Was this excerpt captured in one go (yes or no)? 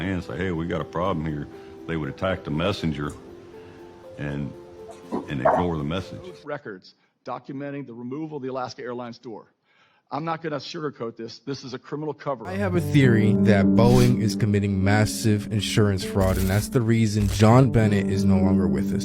no